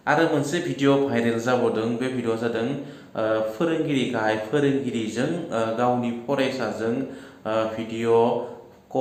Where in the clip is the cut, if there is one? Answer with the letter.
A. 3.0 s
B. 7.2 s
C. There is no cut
C